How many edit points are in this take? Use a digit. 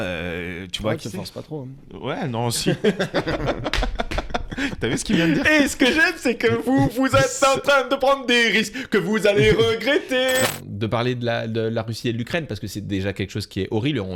1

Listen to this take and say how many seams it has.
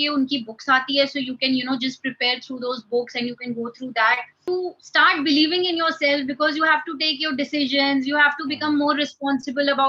1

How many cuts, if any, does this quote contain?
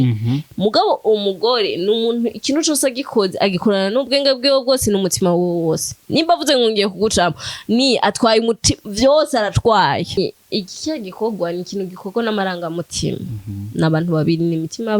1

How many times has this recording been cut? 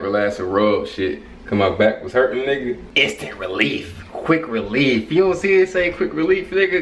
1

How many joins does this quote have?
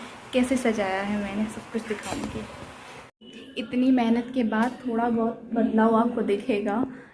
0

